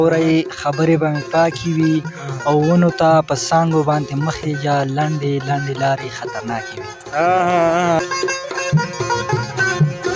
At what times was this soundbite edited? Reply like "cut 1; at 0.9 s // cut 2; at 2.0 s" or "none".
cut 1; at 8.0 s